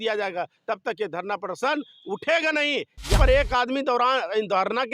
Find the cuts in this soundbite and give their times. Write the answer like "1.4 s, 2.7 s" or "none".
3.2 s